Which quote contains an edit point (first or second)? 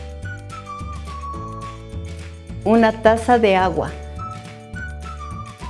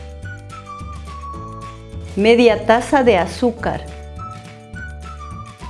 first